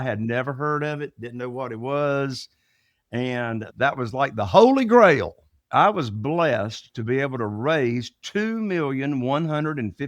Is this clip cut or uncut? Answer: cut